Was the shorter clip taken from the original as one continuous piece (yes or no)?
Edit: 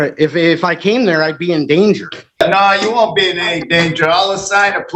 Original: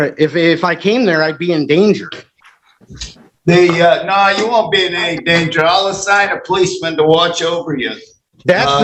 no